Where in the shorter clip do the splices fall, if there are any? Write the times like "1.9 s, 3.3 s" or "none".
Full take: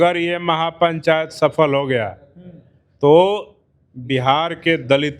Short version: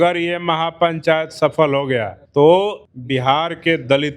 2.2 s, 2.9 s

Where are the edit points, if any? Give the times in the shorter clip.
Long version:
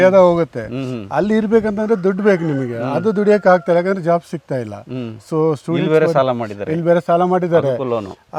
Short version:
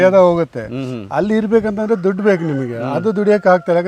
none

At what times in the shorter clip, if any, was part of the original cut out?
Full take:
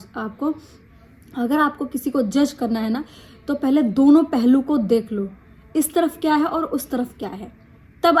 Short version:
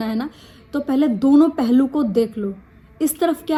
none

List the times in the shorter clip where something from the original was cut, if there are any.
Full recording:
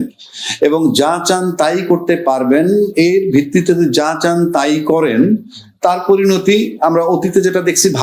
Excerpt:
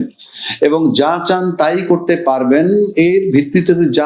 none

